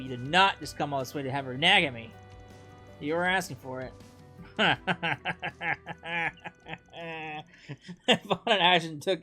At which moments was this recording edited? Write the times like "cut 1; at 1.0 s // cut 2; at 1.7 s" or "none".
none